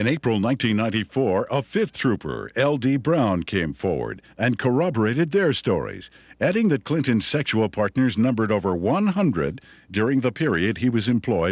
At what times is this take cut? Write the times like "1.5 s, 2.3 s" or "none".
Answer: none